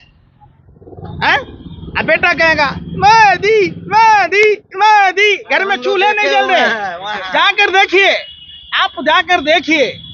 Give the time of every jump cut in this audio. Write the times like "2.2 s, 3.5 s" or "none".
none